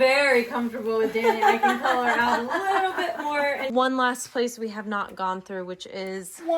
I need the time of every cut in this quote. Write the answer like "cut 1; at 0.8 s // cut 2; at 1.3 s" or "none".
cut 1; at 3.7 s